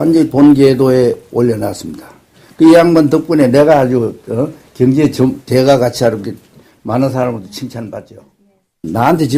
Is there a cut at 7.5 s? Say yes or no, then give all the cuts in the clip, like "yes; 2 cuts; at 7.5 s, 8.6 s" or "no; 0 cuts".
yes; 1 cut; at 7.5 s